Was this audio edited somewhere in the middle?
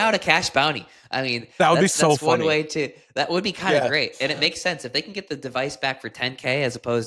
no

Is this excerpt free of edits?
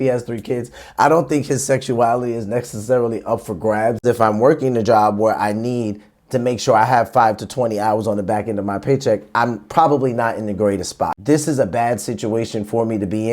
no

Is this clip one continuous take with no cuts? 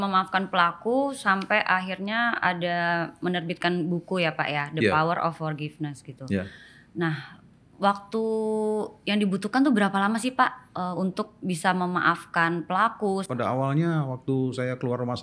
no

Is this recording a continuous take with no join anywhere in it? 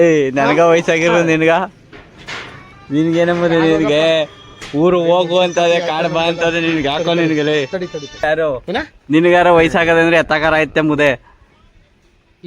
no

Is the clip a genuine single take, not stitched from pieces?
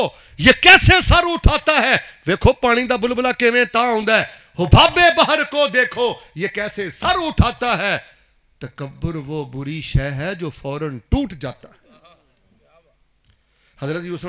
yes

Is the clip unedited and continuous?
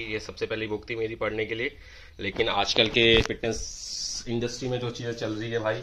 yes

